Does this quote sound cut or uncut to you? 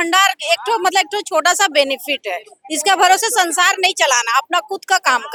uncut